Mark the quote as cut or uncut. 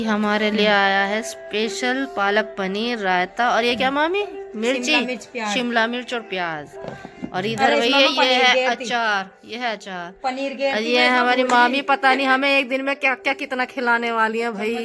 uncut